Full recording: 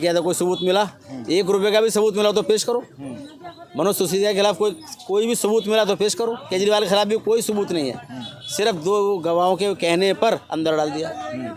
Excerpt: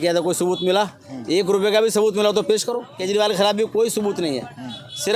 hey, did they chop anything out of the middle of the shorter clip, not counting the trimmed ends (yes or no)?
yes